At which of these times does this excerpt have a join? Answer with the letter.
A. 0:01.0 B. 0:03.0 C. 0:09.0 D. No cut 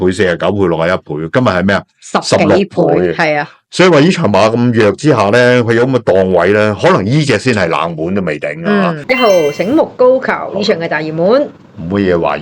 C